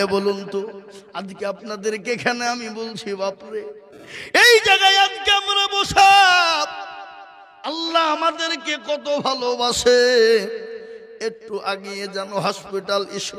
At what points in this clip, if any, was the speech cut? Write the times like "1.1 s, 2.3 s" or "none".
none